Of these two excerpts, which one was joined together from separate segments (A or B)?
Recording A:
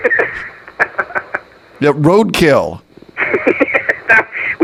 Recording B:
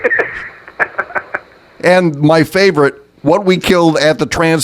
B